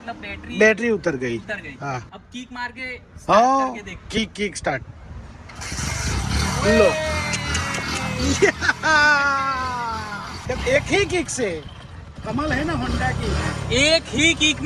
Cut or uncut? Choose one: uncut